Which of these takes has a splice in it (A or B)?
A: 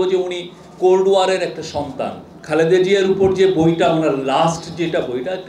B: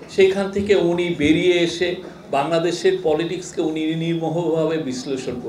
A